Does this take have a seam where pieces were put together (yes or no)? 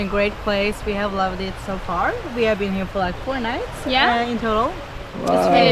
no